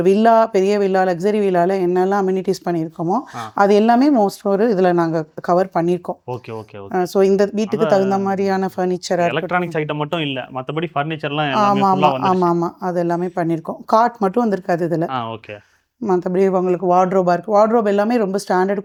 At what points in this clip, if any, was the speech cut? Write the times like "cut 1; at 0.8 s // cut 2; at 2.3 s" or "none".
none